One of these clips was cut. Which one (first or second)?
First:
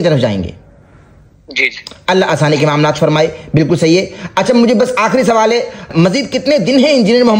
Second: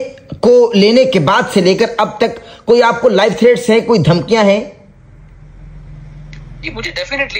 first